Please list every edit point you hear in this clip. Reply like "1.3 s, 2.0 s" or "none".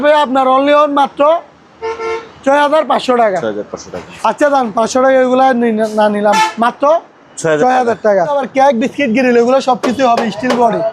8.4 s